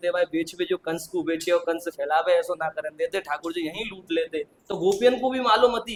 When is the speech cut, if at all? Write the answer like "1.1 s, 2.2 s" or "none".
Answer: none